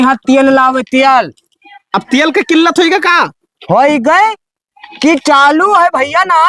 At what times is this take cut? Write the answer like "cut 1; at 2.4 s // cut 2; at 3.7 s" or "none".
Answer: none